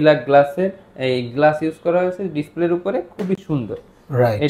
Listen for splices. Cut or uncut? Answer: uncut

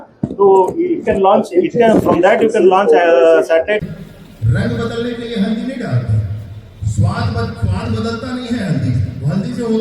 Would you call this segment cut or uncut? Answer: cut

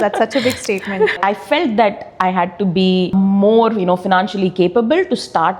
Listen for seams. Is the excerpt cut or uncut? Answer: cut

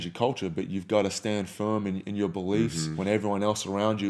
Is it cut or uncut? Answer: cut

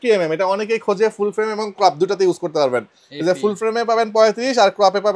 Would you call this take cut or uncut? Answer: uncut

